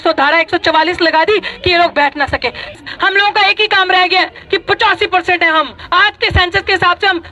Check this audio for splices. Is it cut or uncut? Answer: cut